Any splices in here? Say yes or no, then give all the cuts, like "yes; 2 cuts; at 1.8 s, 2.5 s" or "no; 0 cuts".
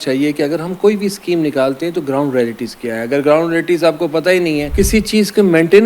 yes; 1 cut; at 4.7 s